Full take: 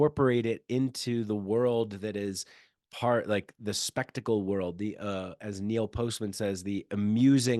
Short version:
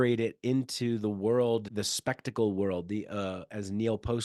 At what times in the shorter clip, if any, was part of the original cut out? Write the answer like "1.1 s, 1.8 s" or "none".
1.7 s